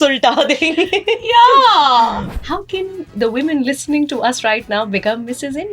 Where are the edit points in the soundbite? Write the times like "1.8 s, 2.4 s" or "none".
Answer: 2.3 s

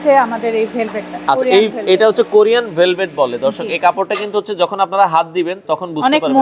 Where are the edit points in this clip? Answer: none

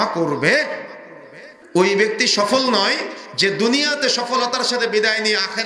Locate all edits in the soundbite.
1.5 s

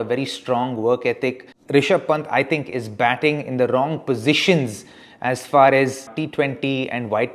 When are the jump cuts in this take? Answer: 1.5 s, 6.1 s

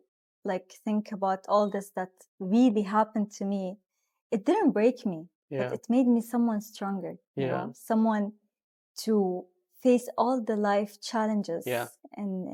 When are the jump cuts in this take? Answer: none

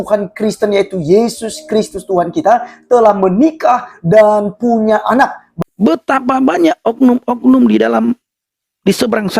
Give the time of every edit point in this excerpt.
5.4 s

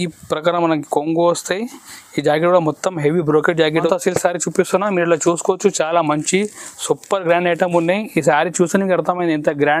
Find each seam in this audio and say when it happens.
3.9 s

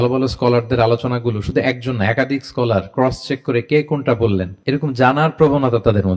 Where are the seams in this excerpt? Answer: none

